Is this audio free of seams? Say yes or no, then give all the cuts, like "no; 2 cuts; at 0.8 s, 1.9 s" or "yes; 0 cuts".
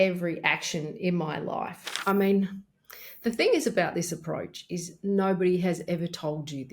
no; 1 cut; at 1.8 s